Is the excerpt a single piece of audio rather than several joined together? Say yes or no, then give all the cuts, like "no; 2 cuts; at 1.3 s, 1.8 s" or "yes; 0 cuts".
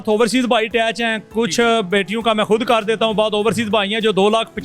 yes; 0 cuts